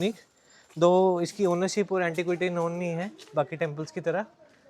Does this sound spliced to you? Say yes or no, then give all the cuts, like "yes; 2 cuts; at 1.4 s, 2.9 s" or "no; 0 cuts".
no; 0 cuts